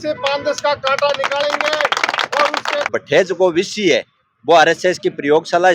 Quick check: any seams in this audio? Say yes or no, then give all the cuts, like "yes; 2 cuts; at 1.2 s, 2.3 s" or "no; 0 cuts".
yes; 1 cut; at 2.9 s